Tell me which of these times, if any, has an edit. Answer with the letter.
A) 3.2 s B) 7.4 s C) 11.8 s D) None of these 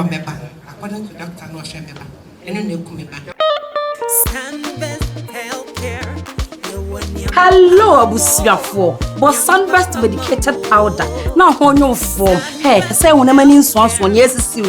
A